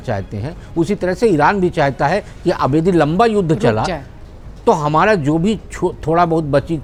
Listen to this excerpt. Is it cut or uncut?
uncut